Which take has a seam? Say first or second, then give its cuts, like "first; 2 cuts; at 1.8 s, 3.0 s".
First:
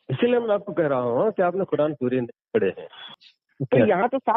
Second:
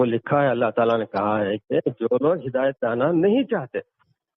first; 1 cut; at 3.1 s